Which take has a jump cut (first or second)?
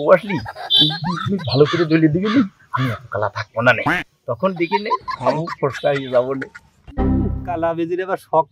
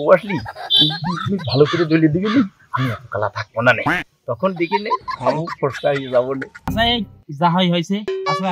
second